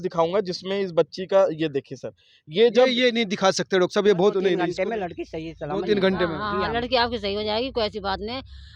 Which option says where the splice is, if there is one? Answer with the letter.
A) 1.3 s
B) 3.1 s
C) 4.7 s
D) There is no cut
C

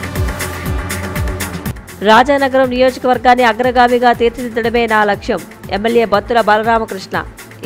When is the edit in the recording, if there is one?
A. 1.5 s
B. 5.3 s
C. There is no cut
A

